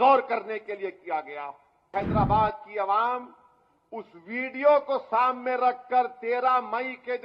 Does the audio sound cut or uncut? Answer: cut